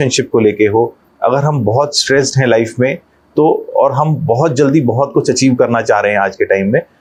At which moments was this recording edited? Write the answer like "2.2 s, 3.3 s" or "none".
none